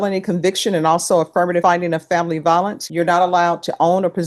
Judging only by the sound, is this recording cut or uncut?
cut